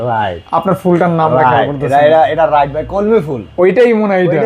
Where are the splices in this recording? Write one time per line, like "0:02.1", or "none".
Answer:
none